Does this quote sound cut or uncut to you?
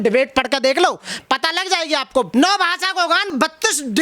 cut